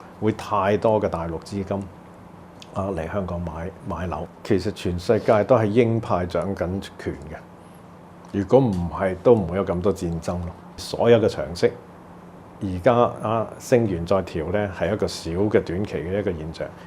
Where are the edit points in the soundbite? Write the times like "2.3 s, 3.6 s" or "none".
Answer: 4.3 s, 10.8 s